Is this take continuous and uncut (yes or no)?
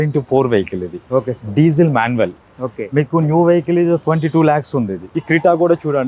no